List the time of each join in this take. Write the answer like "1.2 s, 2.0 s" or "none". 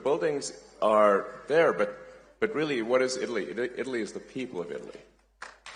none